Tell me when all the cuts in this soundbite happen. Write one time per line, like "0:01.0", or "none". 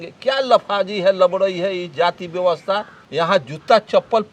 0:03.0